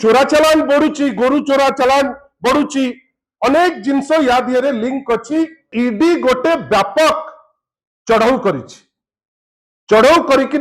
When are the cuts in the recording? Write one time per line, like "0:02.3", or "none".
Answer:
0:05.7

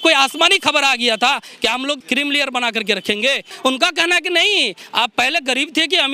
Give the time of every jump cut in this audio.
0:02.0
0:03.5

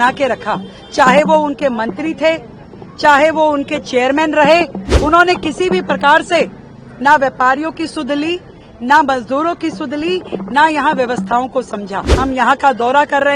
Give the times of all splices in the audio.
0:04.9
0:12.0

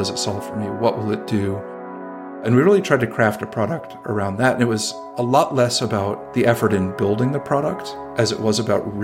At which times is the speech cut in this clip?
none

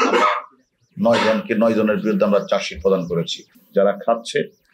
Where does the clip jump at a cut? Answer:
0:03.5

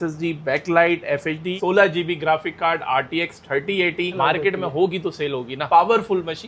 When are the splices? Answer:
0:01.5
0:04.1
0:05.6

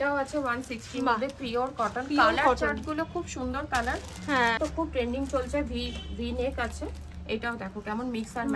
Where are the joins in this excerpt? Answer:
0:04.6

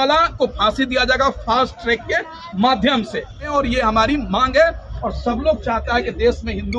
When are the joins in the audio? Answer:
0:03.5
0:04.9

